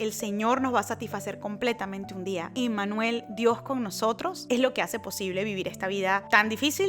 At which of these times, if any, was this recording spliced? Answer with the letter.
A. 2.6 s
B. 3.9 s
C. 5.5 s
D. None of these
A